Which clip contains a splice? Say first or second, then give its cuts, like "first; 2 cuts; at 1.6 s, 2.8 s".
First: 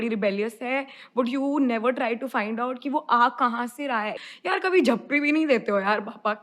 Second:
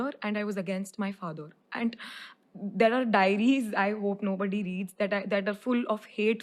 first; 1 cut; at 4.2 s